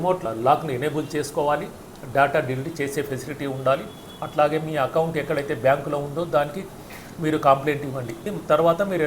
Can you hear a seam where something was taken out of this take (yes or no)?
yes